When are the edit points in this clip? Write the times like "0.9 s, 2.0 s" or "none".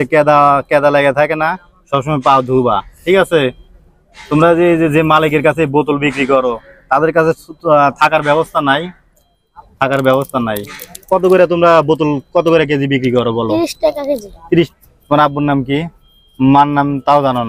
14.7 s